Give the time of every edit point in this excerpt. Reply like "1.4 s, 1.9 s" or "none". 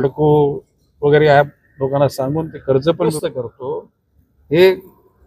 3.1 s